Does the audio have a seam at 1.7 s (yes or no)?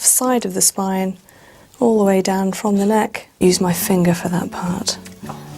no